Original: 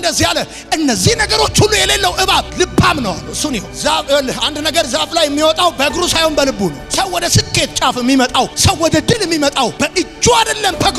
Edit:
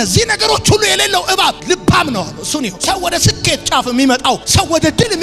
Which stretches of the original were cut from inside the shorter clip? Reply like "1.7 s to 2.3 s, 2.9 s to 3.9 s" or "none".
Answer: 3.7 s to 6.9 s